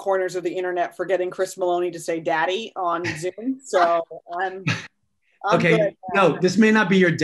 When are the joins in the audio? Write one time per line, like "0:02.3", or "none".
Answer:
none